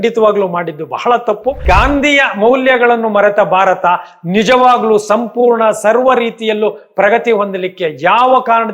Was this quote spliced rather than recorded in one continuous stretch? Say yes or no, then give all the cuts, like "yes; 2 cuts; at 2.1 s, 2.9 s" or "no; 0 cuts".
yes; 1 cut; at 1.6 s